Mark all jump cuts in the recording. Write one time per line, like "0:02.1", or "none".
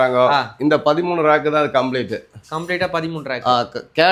none